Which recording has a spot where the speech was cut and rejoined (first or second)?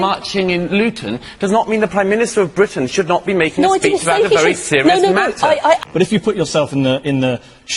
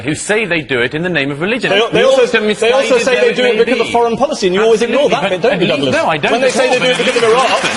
first